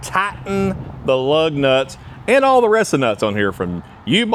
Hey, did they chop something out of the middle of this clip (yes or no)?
no